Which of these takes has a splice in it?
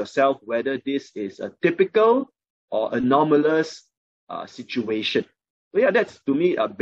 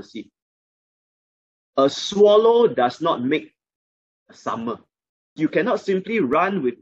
second; 1 cut; at 5.4 s

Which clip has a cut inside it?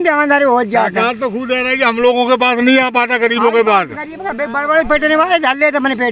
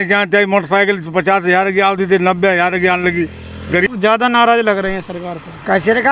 second; 1 cut; at 3.9 s

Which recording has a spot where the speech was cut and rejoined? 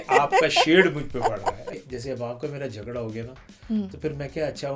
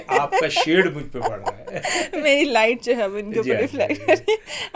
first; 1 cut; at 1.7 s

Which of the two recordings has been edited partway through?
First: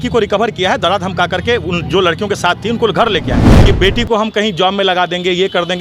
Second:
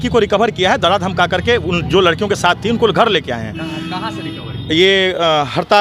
first; 1 cut; at 3.4 s

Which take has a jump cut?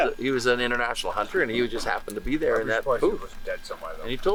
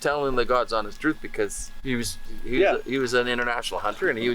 second; 1 cut; at 1.8 s

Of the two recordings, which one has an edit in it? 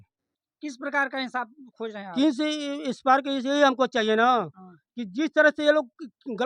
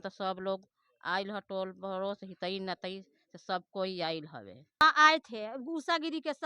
second; 1 cut; at 4.8 s

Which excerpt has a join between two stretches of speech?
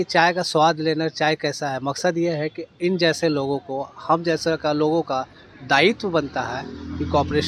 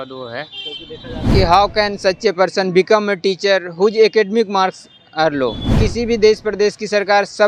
second; 2 cuts; at 1.3 s, 5.7 s

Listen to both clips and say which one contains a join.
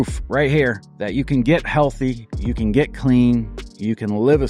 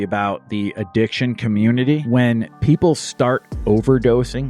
second; 1 cut; at 2.0 s

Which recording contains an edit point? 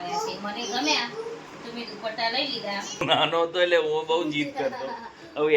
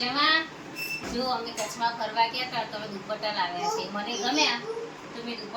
first; 1 cut; at 3.0 s

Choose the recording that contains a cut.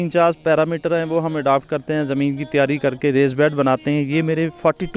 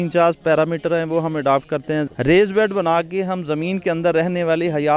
second; 1 cut; at 2.1 s

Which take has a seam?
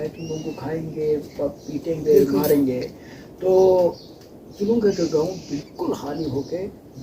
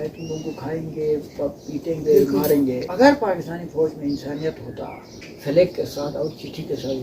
second; 2 cuts; at 2.9 s, 5.3 s

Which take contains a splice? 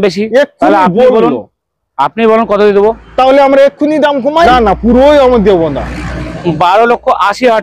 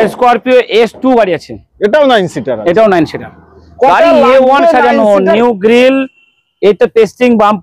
first; 1 cut; at 4.5 s

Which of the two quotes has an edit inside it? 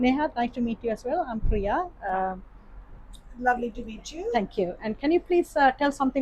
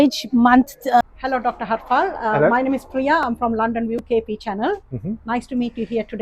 second; 1 cut; at 1.0 s

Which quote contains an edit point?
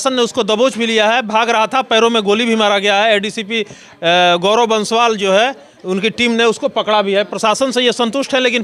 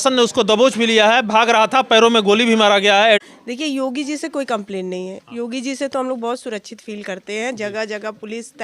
second; 1 cut; at 3.3 s

